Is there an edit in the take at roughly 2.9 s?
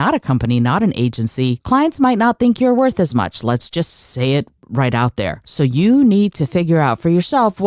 no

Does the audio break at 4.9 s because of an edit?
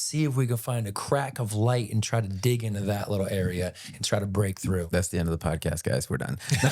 yes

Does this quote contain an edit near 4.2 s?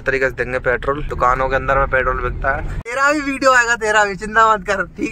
no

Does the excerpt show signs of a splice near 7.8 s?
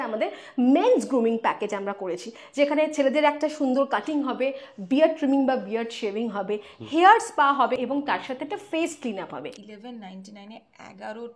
yes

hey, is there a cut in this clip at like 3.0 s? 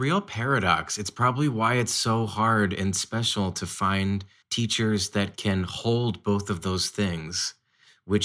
no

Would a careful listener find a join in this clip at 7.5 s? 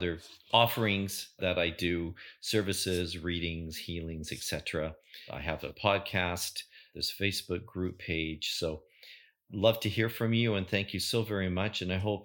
no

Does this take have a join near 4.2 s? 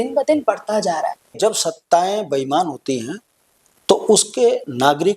no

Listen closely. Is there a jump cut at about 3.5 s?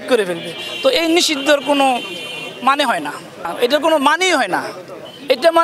yes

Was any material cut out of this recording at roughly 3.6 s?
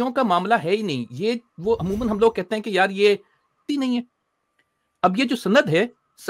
yes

